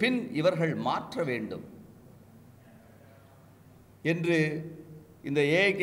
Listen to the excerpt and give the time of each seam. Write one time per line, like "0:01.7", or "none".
none